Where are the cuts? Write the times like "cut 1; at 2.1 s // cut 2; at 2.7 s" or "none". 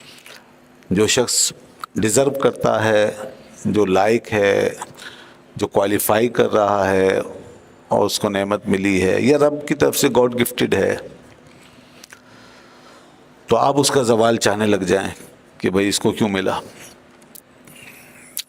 none